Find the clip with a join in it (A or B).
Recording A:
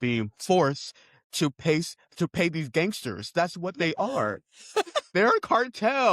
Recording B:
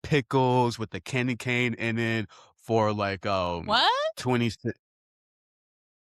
A